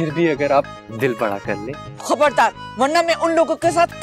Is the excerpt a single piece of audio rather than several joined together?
no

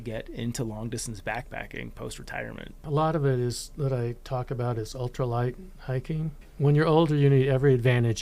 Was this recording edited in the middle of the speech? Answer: yes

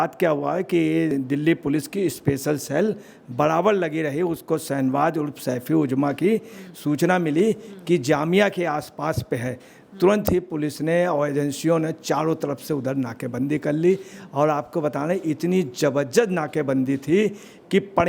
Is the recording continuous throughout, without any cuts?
yes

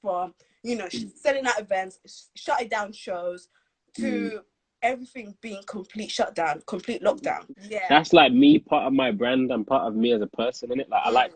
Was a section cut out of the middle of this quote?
yes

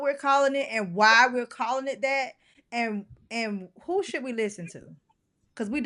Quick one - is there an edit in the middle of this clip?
no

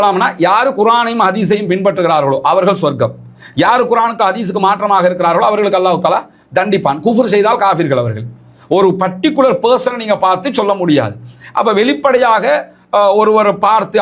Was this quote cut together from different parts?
no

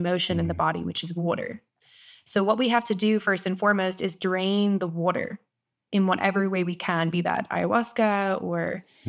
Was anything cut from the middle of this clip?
no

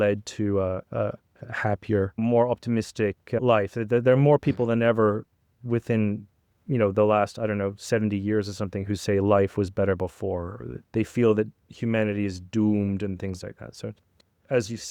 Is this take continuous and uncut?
no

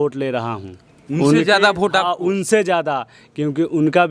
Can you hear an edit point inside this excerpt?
no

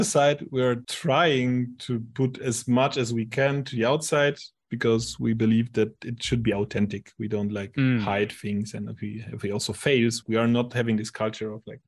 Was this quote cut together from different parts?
yes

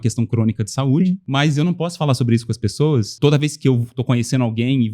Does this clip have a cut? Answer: yes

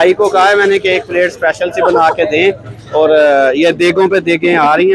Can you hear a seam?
no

